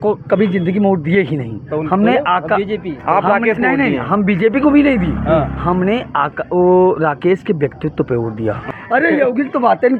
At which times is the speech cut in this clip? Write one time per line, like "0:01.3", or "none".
0:08.7